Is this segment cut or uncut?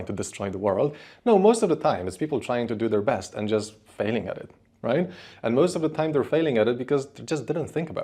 uncut